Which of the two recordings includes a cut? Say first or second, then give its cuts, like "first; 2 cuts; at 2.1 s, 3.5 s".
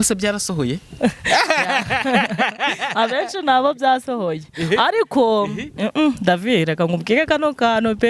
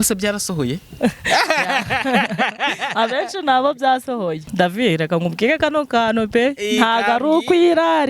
second; 1 cut; at 4.5 s